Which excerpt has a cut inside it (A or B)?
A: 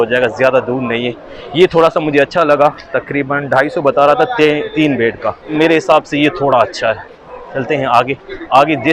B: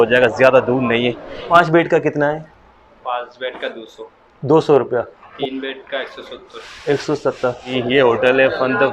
B